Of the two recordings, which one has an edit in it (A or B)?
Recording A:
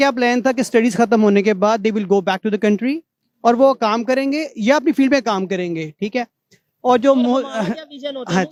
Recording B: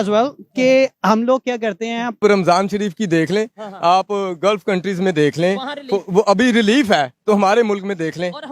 B